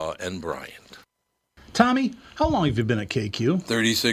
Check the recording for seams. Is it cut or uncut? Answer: cut